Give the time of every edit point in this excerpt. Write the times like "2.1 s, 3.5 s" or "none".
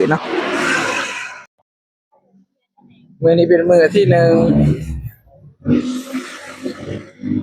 1.5 s